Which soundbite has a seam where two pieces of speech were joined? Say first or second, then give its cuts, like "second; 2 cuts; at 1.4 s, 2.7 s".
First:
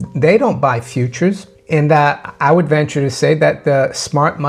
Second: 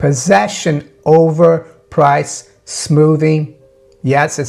first; 1 cut; at 1.5 s